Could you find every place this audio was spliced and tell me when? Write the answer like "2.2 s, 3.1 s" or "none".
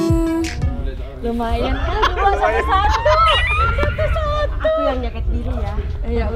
none